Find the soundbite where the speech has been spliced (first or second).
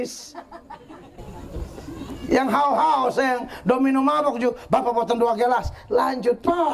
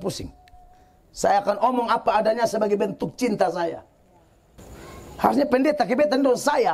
first